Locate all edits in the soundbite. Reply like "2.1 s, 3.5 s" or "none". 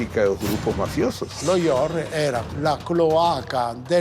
1.4 s, 2.5 s